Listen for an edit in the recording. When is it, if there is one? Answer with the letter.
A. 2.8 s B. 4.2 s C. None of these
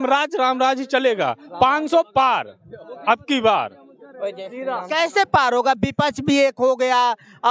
C